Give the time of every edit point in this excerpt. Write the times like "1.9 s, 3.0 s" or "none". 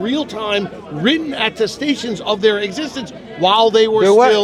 none